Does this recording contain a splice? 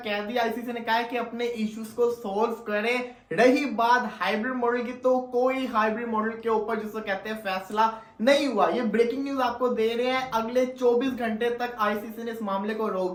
no; 0 cuts

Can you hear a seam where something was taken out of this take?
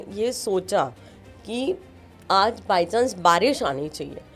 no; 0 cuts

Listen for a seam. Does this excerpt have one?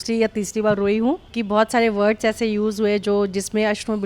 yes; 1 cut; at 1.3 s

